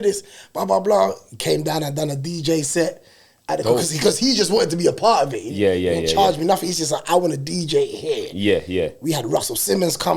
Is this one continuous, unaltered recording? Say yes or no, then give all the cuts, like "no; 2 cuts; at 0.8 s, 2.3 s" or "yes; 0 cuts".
yes; 0 cuts